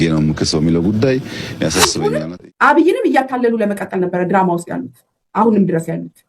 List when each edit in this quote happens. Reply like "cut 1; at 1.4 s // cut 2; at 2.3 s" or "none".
cut 1; at 2.0 s